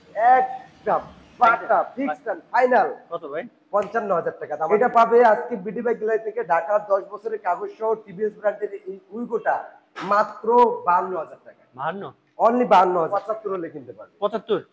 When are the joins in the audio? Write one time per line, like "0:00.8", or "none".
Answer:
0:04.5
0:13.1